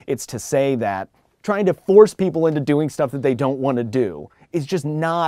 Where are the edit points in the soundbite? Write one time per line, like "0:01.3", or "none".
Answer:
0:01.3